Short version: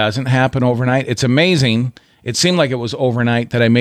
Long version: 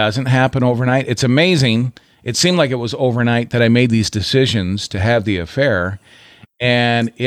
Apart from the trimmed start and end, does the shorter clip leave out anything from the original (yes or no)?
no